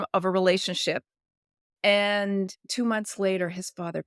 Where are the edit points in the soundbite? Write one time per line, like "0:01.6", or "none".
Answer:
none